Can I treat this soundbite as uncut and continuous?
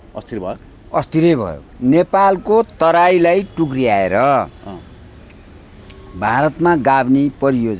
no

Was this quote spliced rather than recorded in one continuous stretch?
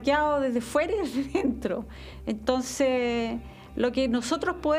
no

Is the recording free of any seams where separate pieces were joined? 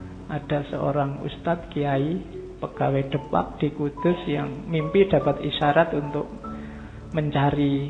yes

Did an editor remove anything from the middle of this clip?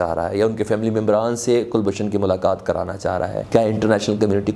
yes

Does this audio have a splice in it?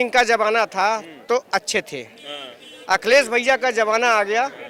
no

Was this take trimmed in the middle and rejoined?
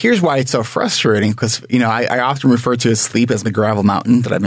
yes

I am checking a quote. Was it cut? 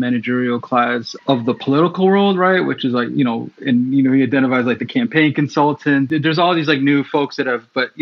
yes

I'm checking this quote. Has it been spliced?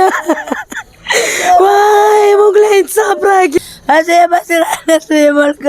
yes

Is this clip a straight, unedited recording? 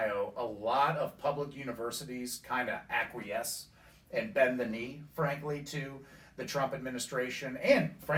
yes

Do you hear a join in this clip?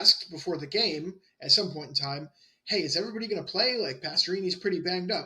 no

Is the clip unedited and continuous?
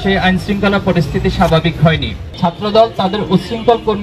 no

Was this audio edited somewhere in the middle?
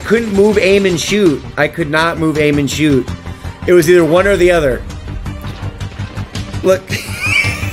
no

